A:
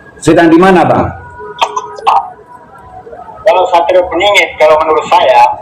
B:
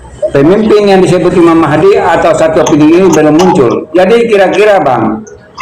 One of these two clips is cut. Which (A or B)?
A